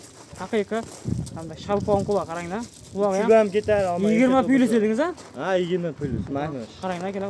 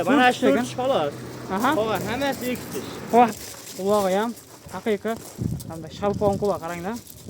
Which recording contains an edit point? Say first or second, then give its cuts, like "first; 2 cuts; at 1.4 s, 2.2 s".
second; 1 cut; at 3.3 s